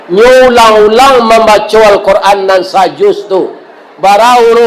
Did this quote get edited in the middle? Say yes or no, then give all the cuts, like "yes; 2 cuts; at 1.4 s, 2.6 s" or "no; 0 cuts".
no; 0 cuts